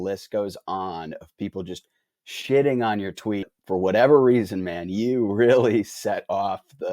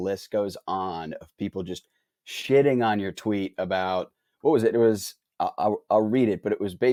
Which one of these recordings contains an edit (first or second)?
first